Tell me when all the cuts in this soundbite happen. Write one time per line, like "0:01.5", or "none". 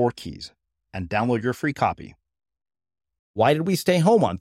0:03.3